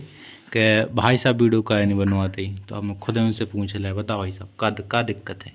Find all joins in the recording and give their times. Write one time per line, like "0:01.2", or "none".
none